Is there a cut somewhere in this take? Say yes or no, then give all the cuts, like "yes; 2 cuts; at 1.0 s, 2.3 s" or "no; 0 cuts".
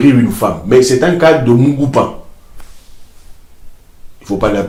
no; 0 cuts